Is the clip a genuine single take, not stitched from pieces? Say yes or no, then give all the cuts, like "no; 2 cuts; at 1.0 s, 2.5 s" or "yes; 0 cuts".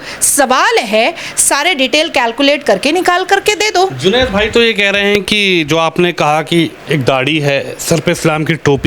yes; 0 cuts